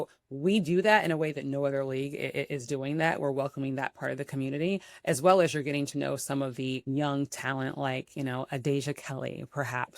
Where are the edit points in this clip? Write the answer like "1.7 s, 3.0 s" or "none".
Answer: 6.8 s